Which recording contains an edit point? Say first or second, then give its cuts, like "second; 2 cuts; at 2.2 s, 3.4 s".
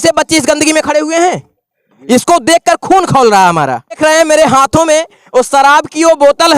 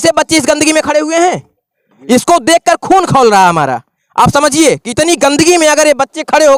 first; 1 cut; at 4.0 s